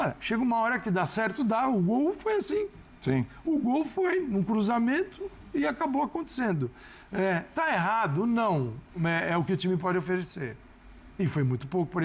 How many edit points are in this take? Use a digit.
0